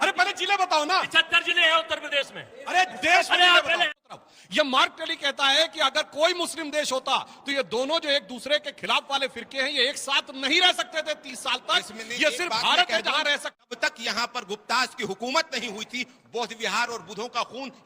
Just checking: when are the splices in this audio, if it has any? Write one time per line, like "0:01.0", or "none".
0:04.1
0:13.6